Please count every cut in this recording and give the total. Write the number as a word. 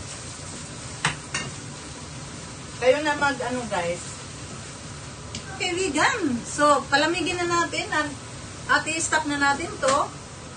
one